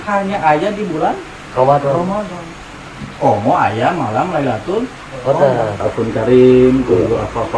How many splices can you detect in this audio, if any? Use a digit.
1